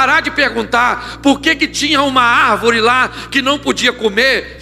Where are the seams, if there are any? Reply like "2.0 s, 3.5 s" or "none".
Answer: none